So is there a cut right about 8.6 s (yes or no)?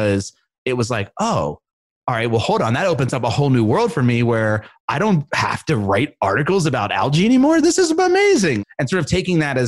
yes